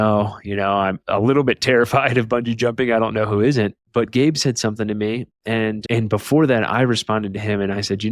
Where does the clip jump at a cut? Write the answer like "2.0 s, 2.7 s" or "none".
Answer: 1.0 s